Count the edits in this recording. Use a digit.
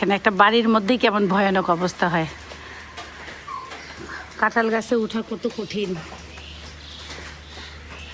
0